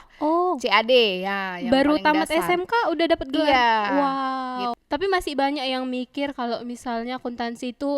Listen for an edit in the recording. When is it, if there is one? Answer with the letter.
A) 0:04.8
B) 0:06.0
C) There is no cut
A